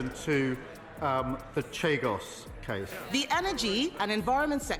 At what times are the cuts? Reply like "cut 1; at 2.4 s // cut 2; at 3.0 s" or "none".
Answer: cut 1; at 2.8 s